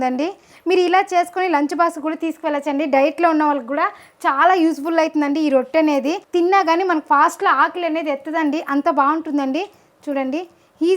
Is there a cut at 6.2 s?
no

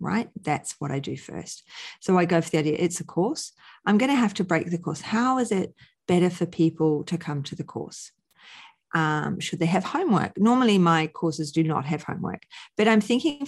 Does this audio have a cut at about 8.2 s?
no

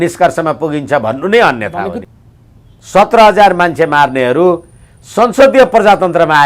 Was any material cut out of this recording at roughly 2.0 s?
yes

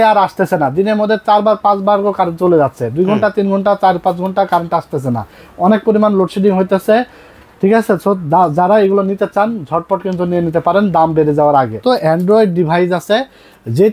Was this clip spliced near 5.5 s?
no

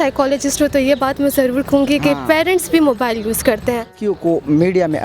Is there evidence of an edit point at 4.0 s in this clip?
yes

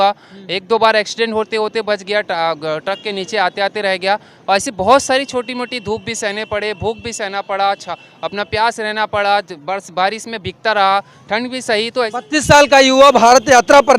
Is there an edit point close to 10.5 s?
no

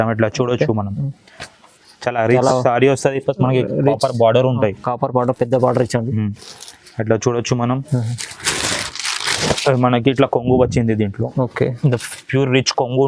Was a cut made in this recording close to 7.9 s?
no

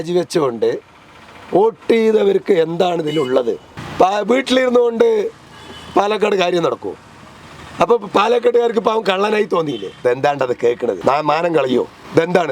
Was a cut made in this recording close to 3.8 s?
yes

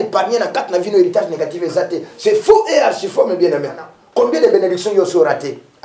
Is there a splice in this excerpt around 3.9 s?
yes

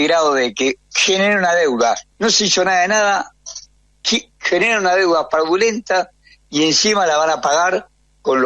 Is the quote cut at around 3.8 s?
no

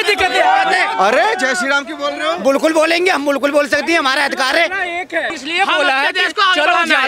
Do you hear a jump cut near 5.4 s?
yes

